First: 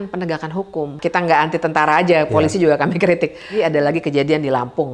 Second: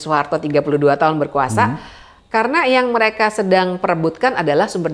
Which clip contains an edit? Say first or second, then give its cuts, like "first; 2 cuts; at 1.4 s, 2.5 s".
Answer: first; 2 cuts; at 1.0 s, 3.5 s